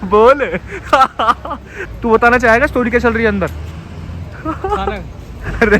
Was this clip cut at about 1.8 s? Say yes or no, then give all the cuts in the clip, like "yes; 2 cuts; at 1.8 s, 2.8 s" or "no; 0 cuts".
yes; 1 cut; at 1.8 s